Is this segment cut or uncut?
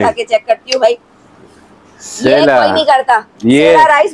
uncut